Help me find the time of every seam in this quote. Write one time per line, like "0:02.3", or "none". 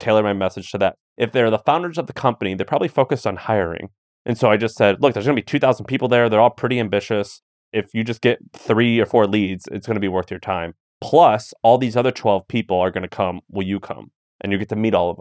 0:01.0